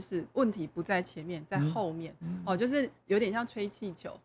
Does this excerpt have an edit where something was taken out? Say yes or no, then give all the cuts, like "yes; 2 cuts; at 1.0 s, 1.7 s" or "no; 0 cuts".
no; 0 cuts